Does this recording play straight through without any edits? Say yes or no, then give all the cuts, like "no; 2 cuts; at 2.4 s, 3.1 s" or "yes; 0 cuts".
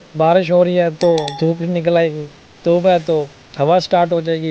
yes; 0 cuts